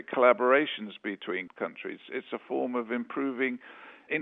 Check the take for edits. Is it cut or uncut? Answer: uncut